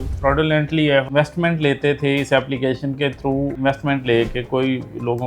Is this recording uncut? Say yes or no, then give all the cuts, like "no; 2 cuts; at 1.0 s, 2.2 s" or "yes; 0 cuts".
no; 1 cut; at 1.1 s